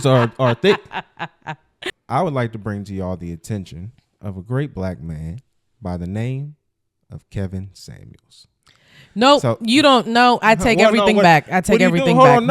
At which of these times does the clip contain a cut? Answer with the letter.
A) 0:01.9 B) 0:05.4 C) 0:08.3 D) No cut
A